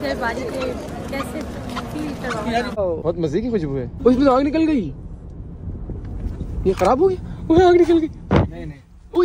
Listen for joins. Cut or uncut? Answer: cut